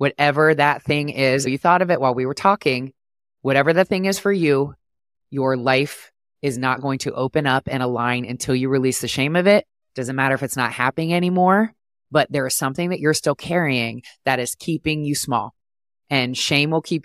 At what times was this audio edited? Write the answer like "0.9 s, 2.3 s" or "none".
1.5 s